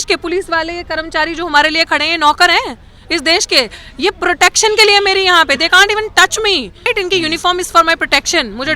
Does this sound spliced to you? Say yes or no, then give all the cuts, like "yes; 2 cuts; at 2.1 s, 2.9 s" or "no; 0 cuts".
yes; 1 cut; at 6.9 s